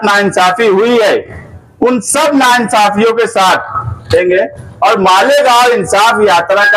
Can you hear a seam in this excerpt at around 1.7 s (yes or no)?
no